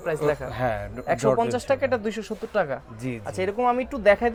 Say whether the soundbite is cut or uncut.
uncut